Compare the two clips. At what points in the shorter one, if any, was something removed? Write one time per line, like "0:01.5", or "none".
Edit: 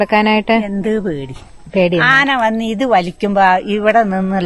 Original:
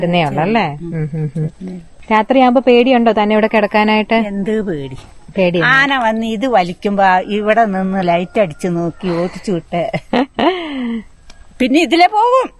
none